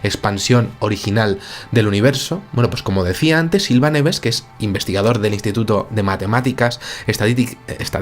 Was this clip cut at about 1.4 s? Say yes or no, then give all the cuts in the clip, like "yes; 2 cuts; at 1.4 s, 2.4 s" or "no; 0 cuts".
yes; 1 cut; at 1.4 s